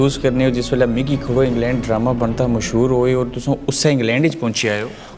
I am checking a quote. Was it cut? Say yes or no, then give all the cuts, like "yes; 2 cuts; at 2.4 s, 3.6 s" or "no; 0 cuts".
no; 0 cuts